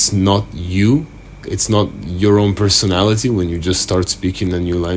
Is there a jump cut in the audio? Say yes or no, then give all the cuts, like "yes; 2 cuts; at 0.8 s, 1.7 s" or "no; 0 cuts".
no; 0 cuts